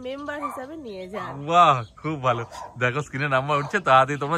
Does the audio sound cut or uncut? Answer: uncut